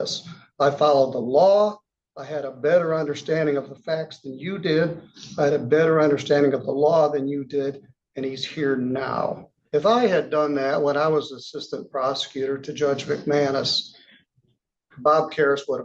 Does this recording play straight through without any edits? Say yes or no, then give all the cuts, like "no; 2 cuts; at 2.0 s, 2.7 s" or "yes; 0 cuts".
no; 1 cut; at 9.5 s